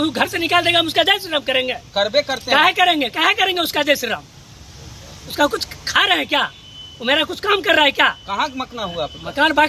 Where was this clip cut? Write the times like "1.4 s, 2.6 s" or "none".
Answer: none